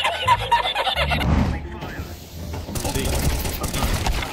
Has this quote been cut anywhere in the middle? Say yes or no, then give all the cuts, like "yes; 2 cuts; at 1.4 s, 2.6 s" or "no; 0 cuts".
yes; 1 cut; at 1.2 s